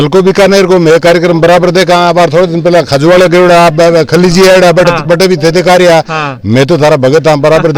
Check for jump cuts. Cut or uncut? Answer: uncut